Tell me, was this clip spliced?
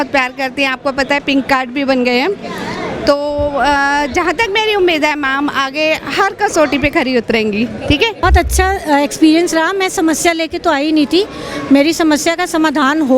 yes; 1 cut; at 8.2 s

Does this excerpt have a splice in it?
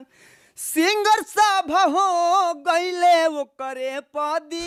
no; 0 cuts

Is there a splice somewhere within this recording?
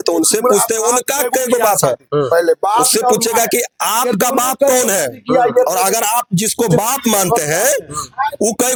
no; 0 cuts

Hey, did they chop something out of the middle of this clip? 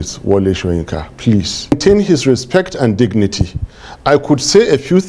yes; 1 cut; at 1.7 s

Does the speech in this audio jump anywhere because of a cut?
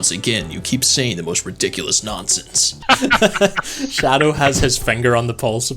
yes; 1 cut; at 2.8 s

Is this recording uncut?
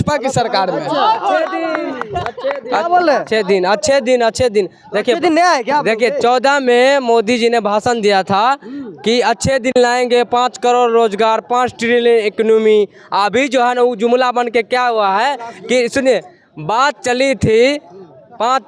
yes; 0 cuts

